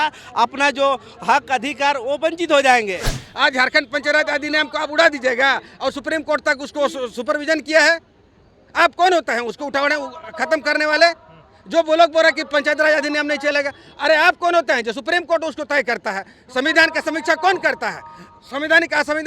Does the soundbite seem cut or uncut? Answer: cut